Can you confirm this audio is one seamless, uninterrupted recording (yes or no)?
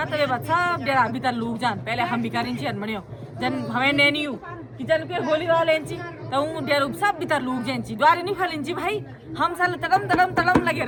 yes